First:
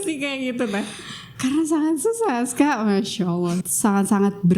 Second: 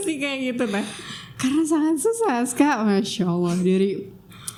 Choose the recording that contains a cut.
first; 1 cut; at 3.6 s

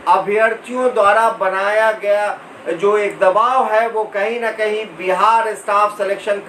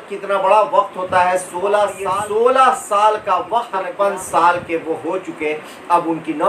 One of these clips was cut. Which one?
second; 2 cuts; at 2.0 s, 3.8 s

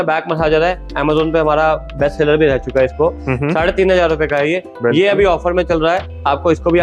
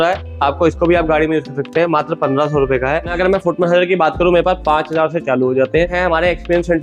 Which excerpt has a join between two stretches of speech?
second; 2 cuts; at 3.1 s, 5.9 s

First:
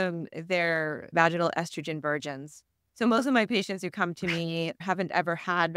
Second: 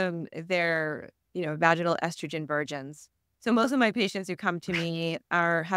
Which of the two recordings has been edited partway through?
first; 2 cuts; at 1.1 s, 4.8 s

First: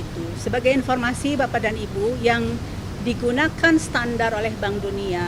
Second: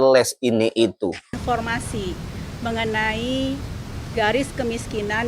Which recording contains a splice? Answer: second; 1 cut; at 1.3 s

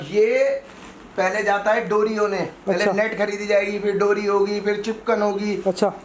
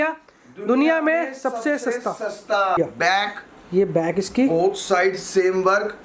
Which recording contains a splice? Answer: second; 1 cut; at 2.8 s

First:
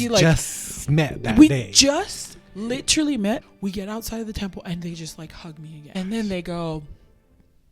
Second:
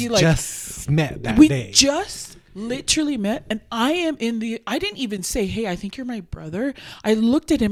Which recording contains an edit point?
first; 2 cuts; at 3.4 s, 5.9 s

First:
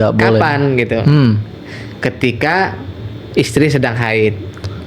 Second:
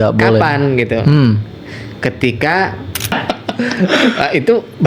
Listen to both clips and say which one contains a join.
second; 1 cut; at 3.2 s

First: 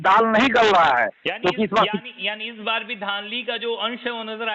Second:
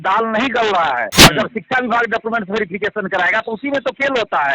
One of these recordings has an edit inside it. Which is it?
second; 1 cut; at 1.2 s

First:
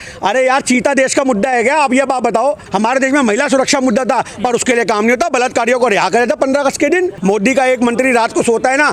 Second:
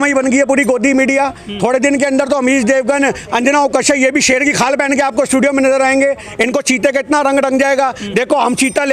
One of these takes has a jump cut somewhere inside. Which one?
first; 2 cuts; at 2.7 s, 7.2 s

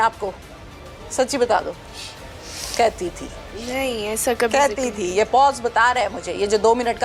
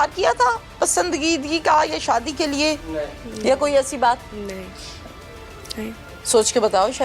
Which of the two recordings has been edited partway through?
second; 1 cut; at 4.3 s

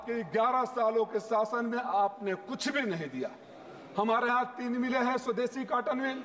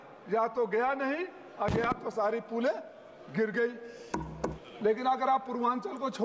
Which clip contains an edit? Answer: second; 1 cut; at 4.6 s

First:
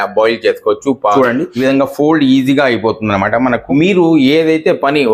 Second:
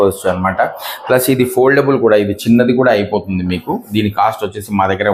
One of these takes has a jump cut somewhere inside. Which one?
first; 2 cuts; at 1.2 s, 3.7 s

